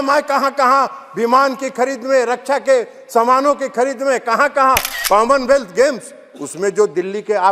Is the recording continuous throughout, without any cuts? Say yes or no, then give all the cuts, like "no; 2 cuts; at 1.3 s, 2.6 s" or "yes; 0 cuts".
no; 1 cut; at 4.9 s